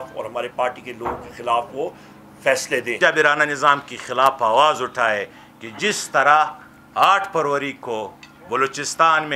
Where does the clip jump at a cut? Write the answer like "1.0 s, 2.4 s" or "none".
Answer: 3.0 s